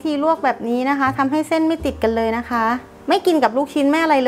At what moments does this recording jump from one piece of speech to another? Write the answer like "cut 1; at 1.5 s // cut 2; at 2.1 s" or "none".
cut 1; at 2.9 s